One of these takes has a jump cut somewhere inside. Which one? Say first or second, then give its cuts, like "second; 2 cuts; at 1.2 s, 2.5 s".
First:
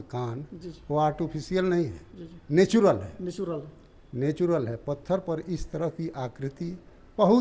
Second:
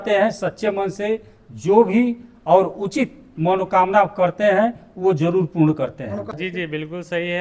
second; 1 cut; at 6.2 s